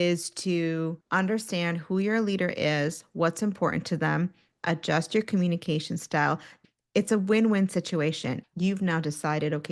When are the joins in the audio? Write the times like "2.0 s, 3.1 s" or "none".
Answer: 1.0 s, 6.6 s, 8.3 s